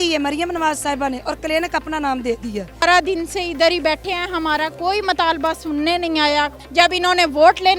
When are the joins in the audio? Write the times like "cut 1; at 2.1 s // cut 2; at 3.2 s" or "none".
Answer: cut 1; at 2.8 s // cut 2; at 6.5 s